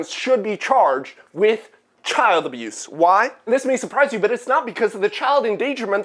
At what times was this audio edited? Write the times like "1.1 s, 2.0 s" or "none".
none